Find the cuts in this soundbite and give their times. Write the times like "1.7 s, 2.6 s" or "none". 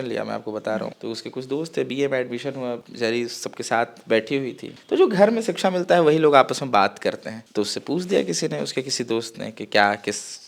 1.0 s